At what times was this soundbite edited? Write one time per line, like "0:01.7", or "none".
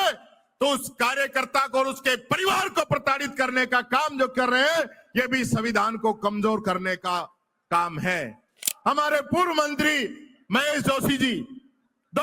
0:08.6